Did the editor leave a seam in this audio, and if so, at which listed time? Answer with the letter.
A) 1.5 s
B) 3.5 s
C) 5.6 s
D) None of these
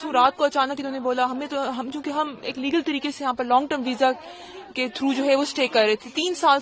D